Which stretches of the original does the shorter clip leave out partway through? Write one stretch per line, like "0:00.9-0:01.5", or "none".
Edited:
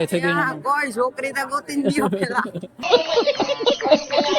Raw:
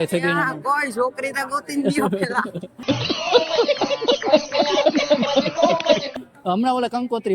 0:02.8-0:03.2